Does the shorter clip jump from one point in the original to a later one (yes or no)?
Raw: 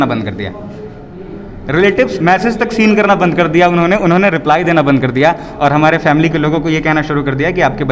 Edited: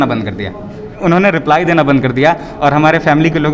yes